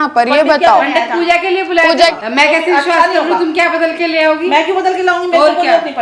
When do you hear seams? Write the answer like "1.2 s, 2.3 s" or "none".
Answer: 2.0 s